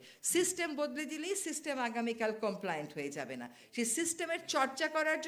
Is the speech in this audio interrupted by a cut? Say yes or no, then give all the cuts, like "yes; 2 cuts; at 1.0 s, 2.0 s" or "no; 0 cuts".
no; 0 cuts